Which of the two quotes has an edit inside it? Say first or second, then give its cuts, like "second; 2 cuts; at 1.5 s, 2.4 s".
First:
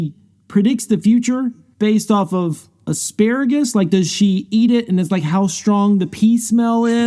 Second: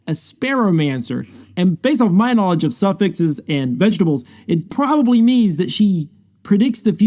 second; 1 cut; at 4.7 s